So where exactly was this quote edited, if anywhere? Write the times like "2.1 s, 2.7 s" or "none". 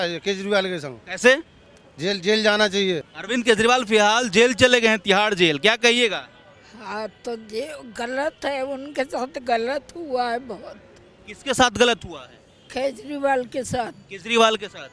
none

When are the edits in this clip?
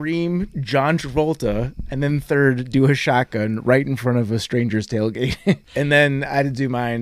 5.7 s

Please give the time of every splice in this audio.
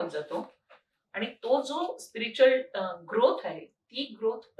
none

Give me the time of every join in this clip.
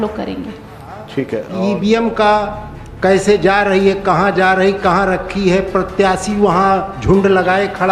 1.5 s

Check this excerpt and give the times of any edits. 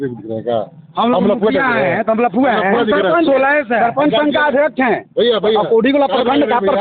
none

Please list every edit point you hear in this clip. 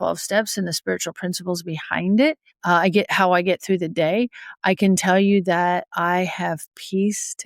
2.5 s

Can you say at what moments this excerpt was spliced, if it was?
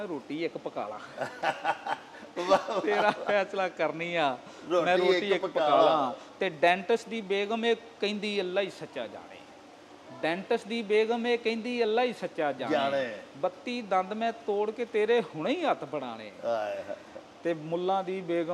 none

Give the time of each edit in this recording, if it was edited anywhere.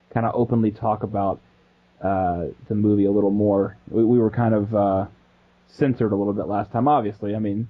0.9 s

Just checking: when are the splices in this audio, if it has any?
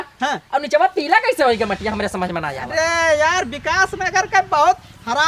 none

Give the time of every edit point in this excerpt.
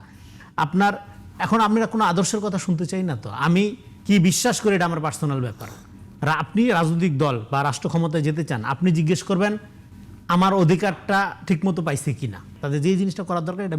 12.5 s

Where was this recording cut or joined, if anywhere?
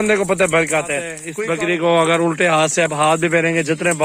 1.2 s

